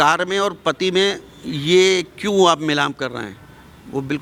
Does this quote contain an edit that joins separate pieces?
no; 0 cuts

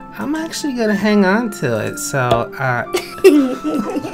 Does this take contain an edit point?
yes; 1 cut; at 3.1 s

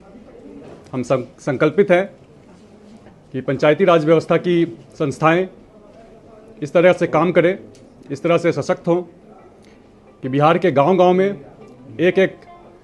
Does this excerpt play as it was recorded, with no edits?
yes; 0 cuts

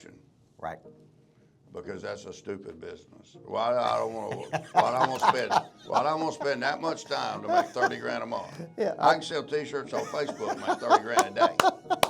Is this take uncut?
yes; 0 cuts

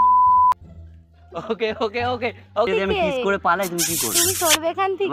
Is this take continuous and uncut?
no; 1 cut; at 2.7 s

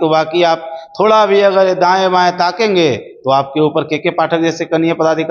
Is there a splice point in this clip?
no; 0 cuts

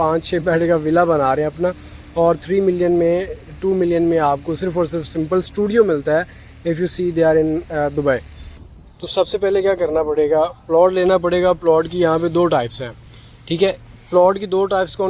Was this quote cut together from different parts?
yes; 1 cut; at 8.6 s

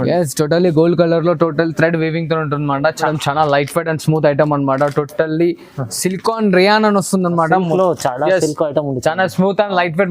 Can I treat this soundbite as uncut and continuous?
no; 1 cut; at 3.0 s

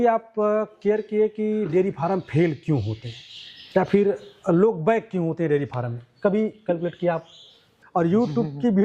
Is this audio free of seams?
no; 1 cut; at 7.7 s

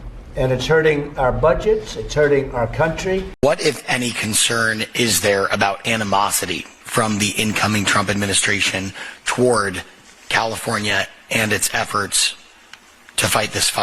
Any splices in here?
yes; 1 cut; at 3.3 s

